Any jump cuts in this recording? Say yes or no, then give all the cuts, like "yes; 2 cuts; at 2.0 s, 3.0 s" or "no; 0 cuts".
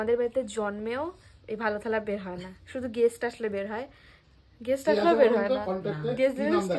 no; 0 cuts